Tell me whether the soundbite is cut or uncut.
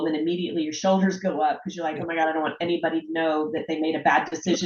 uncut